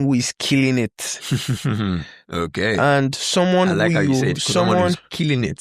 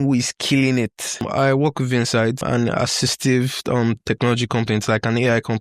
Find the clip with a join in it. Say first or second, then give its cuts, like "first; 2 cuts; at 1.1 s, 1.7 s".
second; 2 cuts; at 1.2 s, 2.4 s